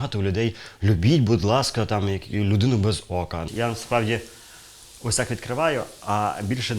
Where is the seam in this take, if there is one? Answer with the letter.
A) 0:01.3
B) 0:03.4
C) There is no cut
B